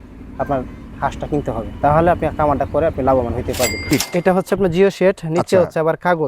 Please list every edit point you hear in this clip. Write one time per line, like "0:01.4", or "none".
0:03.9